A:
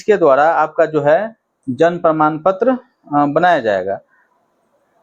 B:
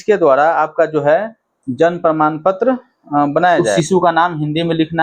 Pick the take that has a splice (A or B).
B